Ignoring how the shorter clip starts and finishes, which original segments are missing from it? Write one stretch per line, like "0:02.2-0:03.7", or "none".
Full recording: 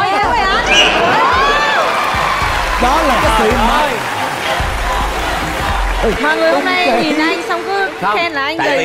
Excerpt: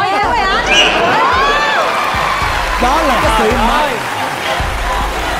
none